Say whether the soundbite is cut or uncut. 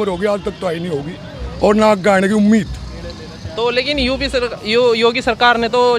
uncut